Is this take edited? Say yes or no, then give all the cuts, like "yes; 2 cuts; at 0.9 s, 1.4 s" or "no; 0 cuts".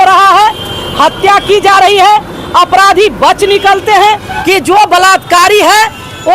yes; 1 cut; at 4.3 s